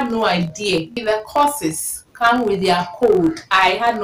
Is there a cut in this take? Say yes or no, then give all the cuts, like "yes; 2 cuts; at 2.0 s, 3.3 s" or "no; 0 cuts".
yes; 1 cut; at 0.9 s